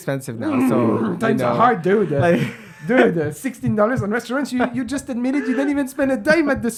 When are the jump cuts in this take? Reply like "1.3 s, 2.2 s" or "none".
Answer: none